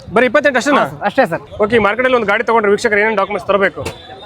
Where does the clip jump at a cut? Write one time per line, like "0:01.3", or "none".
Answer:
0:01.4